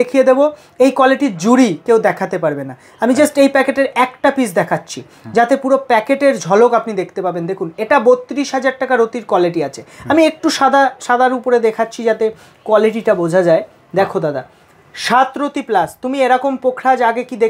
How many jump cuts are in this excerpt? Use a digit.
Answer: 0